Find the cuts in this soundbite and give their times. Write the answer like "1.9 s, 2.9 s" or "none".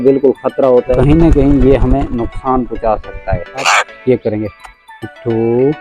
1.0 s, 3.7 s